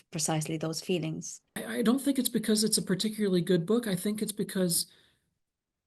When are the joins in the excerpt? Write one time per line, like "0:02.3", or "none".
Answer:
0:01.6